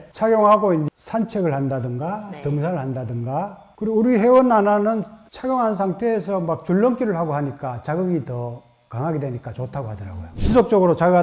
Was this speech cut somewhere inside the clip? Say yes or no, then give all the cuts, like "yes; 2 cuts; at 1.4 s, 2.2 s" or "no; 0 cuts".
yes; 1 cut; at 10.3 s